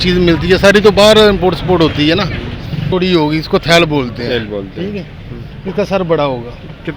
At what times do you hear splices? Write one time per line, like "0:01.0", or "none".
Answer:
0:02.8